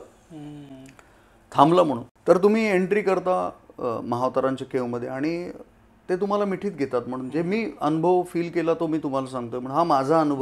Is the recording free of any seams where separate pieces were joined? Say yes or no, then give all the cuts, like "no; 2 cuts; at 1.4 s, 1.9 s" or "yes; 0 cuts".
yes; 0 cuts